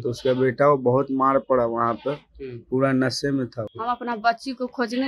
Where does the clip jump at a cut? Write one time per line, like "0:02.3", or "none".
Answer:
0:03.7